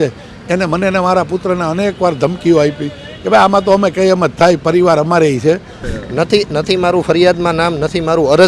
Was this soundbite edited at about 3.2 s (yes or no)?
no